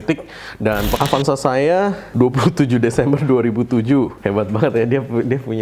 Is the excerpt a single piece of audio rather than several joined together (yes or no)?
no